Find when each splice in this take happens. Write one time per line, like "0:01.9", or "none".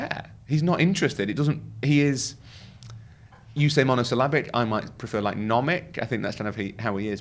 none